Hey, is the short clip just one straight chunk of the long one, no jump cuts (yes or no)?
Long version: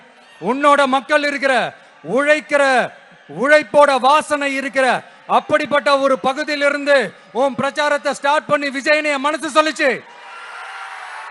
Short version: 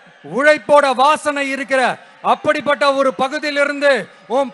yes